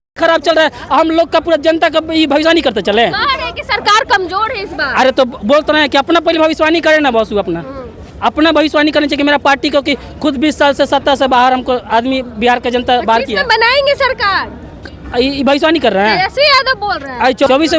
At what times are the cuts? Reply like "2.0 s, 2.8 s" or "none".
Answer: none